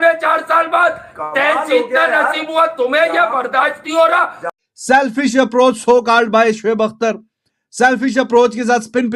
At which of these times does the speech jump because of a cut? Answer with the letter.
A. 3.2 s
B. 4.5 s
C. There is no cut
B